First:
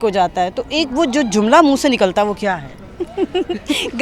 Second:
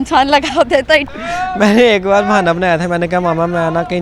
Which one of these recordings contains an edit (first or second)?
second